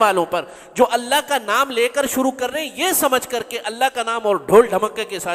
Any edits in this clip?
no; 0 cuts

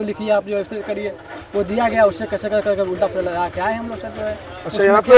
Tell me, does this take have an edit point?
no; 0 cuts

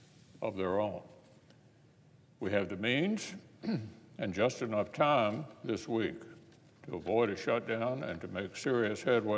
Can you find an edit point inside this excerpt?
yes; 1 cut; at 4.4 s

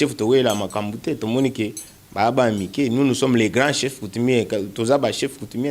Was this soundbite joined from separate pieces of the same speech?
no; 0 cuts

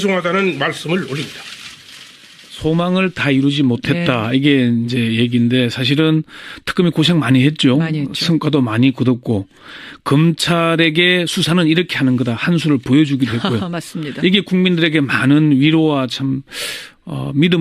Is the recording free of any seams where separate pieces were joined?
no; 1 cut; at 7.7 s

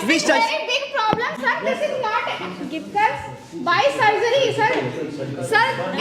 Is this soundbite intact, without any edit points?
yes; 0 cuts

